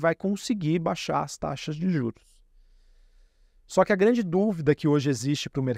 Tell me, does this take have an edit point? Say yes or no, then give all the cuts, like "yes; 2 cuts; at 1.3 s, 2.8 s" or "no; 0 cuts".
no; 0 cuts